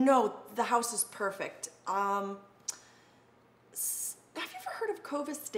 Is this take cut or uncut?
uncut